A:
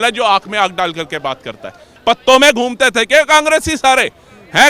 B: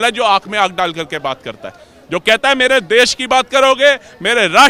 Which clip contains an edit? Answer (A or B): A